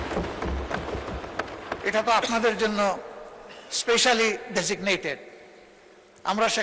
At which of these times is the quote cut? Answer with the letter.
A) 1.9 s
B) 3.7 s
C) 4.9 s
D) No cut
D